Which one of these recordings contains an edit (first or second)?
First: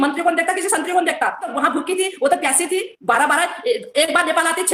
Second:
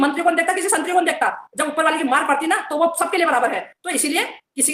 first